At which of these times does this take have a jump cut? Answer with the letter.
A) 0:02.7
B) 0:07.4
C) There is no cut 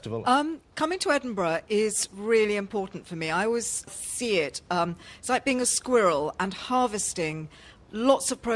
B